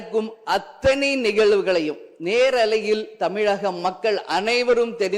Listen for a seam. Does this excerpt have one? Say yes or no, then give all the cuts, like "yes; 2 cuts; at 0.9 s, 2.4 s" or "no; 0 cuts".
no; 0 cuts